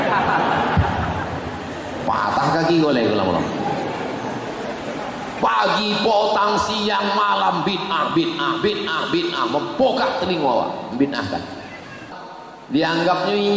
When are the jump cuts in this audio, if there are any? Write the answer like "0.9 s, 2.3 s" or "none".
12.1 s